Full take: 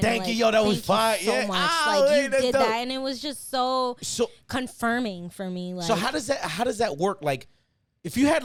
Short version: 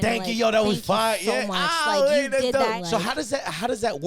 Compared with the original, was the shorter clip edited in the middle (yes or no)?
yes